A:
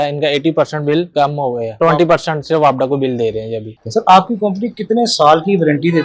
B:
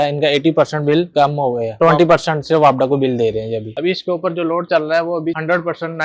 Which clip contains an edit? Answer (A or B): B